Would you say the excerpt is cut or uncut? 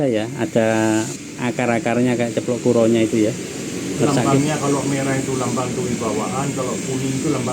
cut